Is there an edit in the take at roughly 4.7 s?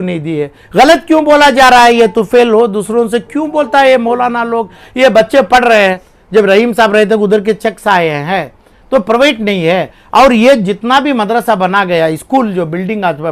no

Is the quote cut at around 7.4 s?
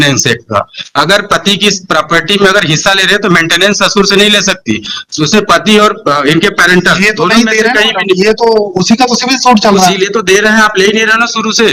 no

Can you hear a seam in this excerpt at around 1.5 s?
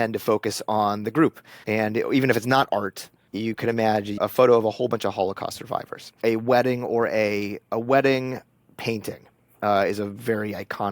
yes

